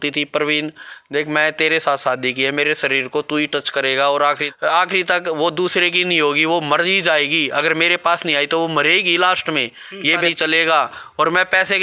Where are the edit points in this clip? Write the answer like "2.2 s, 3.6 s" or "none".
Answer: 4.4 s, 10.3 s

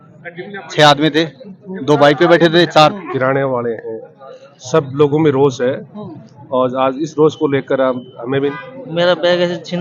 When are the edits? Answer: 3.0 s, 8.5 s

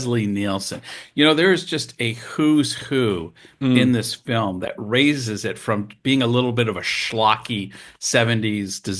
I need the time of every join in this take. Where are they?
none

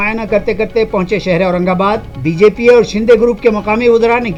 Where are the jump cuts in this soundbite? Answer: none

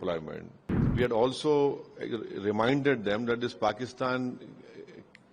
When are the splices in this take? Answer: 0.9 s

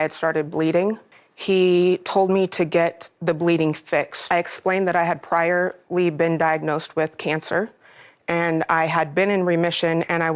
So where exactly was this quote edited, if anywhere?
4.2 s

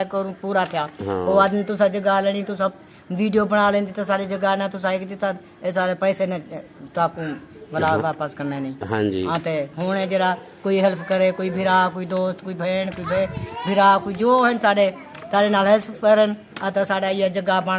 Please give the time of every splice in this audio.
none

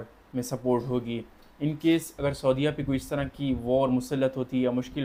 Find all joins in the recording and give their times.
none

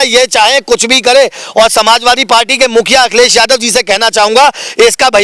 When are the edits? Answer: none

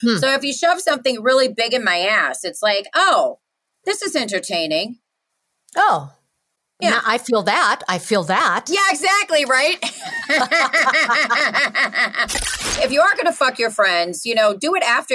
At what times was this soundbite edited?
12.7 s

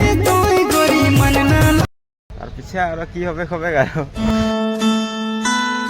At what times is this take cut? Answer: 4.3 s

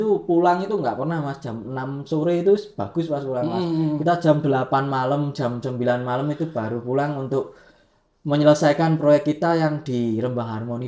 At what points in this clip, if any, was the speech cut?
none

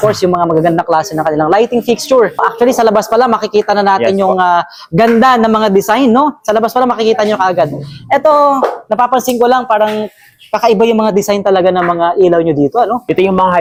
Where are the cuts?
none

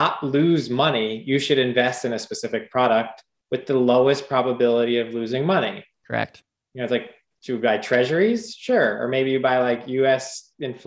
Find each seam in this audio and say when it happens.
none

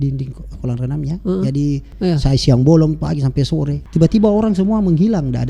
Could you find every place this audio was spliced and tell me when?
1.9 s, 3.8 s

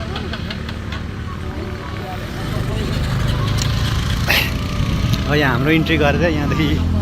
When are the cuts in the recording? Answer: none

